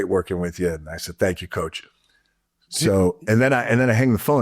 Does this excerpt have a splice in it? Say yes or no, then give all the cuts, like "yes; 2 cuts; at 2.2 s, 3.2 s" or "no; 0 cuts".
no; 0 cuts